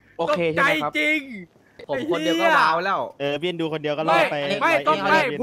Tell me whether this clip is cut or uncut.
uncut